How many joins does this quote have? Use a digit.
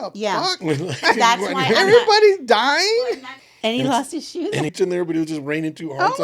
2